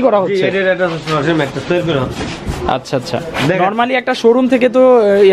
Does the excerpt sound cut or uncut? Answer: uncut